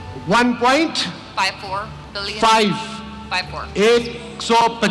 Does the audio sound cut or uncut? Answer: uncut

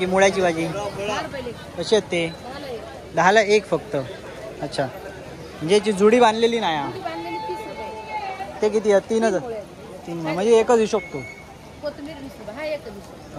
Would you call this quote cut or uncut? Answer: uncut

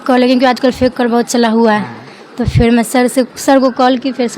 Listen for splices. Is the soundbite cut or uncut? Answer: uncut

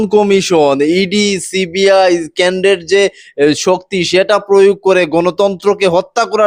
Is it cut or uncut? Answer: uncut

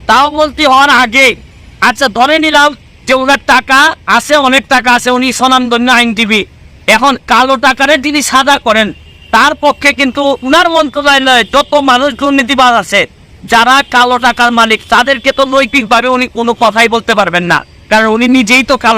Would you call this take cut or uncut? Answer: uncut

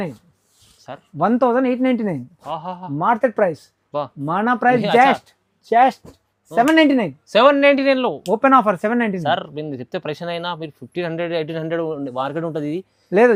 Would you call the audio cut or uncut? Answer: uncut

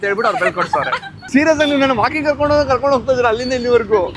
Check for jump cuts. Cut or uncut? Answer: cut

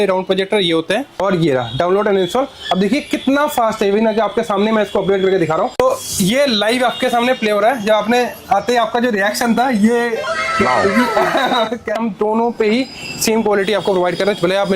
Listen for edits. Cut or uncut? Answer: cut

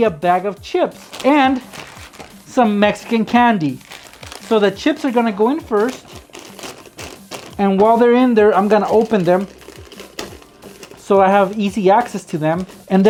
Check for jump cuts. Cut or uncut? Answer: uncut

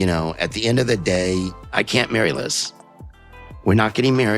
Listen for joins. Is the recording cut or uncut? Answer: uncut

